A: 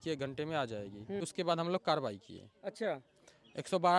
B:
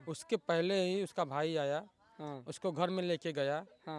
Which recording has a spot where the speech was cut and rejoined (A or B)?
A